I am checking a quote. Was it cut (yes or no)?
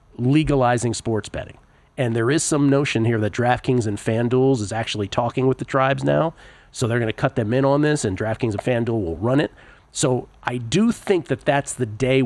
no